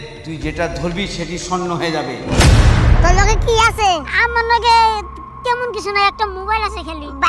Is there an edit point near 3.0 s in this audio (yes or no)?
yes